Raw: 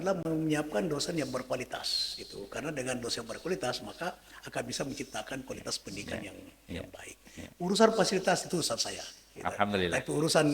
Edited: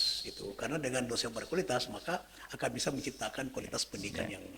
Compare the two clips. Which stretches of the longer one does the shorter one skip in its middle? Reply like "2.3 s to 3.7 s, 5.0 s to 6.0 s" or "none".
none